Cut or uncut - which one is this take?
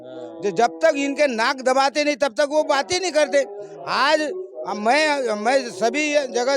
uncut